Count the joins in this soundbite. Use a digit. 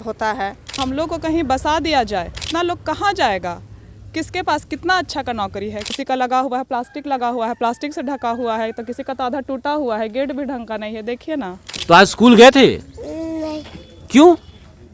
4